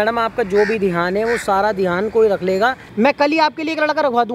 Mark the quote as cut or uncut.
cut